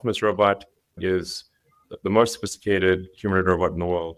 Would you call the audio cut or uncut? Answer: uncut